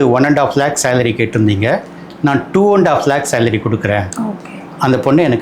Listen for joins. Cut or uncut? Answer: uncut